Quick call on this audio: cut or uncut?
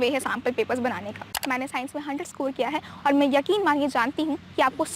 cut